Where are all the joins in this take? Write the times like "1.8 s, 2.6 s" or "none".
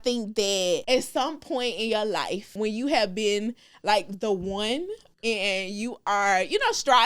0.8 s, 2.5 s, 5.0 s